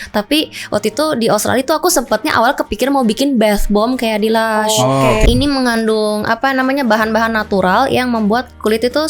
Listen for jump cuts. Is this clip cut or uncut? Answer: cut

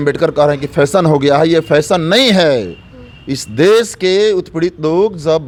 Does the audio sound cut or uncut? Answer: uncut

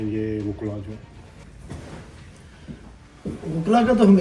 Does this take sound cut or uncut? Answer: uncut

